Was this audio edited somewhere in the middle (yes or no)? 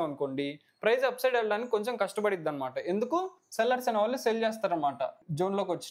no